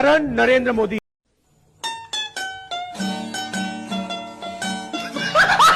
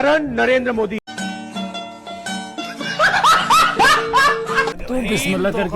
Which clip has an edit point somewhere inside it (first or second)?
second